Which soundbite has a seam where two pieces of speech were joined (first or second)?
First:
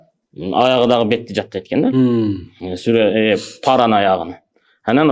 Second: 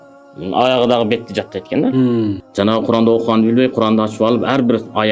second